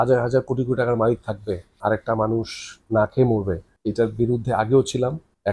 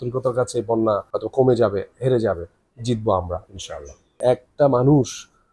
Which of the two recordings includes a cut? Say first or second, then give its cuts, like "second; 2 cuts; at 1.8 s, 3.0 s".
second; 2 cuts; at 1.2 s, 4.2 s